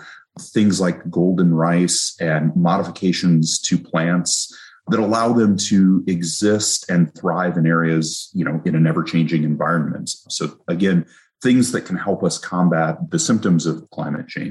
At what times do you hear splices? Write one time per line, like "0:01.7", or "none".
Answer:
none